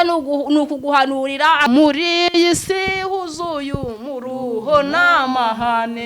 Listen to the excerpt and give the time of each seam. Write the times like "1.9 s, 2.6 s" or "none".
1.7 s